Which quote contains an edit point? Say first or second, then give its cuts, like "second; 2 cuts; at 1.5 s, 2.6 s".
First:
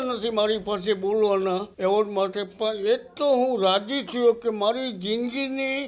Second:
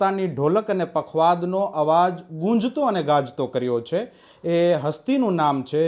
first; 1 cut; at 1.7 s